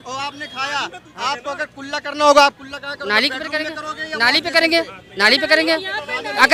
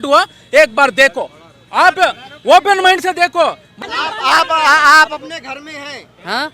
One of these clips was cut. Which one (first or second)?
second